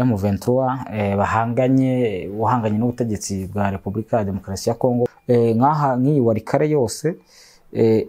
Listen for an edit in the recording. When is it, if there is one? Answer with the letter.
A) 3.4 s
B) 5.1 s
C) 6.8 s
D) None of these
B